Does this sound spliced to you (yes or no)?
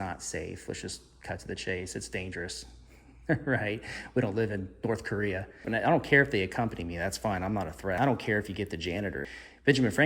yes